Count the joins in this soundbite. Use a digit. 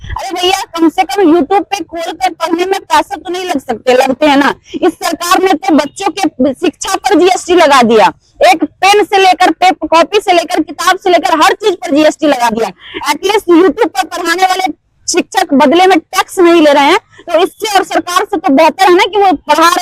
0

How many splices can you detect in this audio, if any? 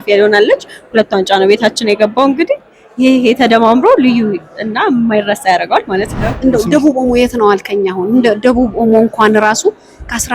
1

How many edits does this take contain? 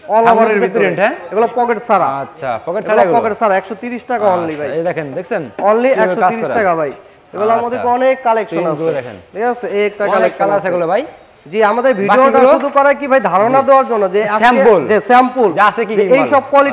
0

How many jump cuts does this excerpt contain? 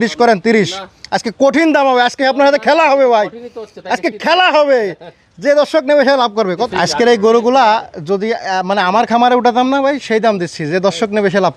1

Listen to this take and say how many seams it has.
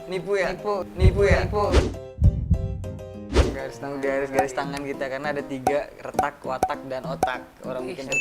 1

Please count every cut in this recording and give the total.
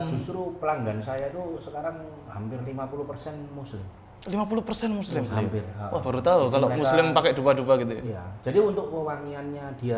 0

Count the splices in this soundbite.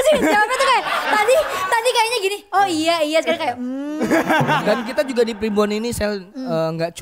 1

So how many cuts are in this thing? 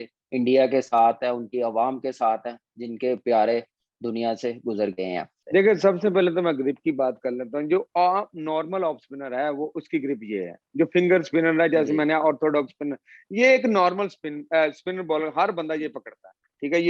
1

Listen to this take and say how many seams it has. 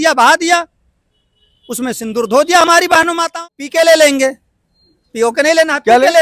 1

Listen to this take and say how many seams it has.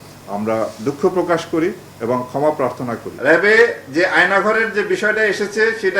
1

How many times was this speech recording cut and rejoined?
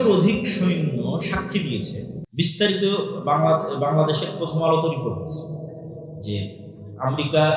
1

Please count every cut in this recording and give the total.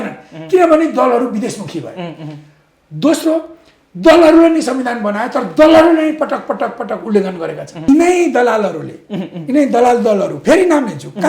1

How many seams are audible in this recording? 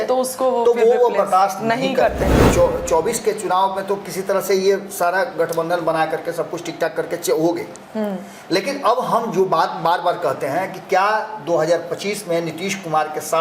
1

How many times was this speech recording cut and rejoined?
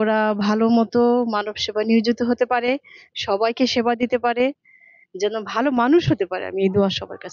0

